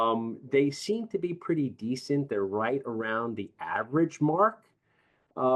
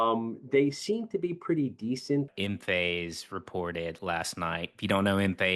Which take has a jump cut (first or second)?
second